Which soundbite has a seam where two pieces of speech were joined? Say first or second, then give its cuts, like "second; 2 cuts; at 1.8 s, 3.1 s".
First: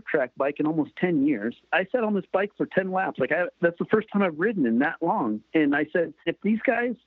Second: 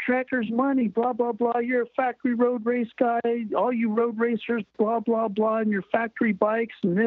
first; 3 cuts; at 1.6 s, 3.5 s, 6.3 s